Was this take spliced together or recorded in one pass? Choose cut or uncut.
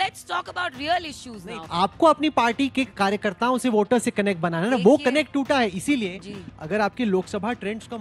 cut